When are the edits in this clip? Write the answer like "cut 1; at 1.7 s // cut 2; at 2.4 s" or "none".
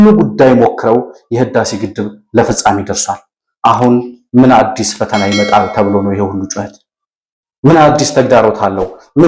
none